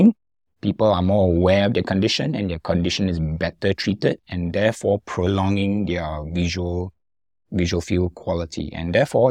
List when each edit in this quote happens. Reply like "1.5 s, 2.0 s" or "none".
none